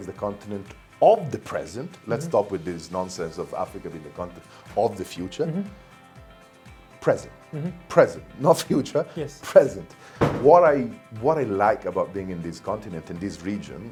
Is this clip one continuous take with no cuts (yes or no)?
yes